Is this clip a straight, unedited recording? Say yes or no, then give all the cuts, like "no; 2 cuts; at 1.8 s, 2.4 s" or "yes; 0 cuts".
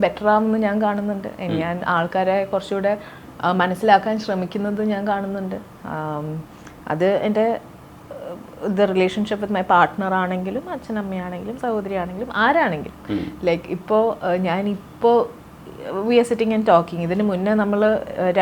yes; 0 cuts